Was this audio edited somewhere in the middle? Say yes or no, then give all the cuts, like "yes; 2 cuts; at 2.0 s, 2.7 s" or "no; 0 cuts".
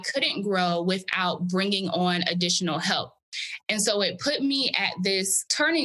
no; 0 cuts